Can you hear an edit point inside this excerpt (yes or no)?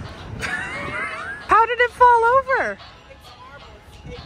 yes